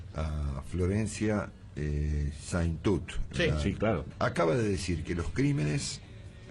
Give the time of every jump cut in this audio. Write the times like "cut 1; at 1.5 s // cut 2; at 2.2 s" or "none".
cut 1; at 4.1 s